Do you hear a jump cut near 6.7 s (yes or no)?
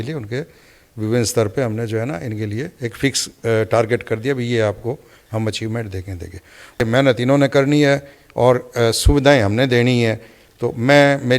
yes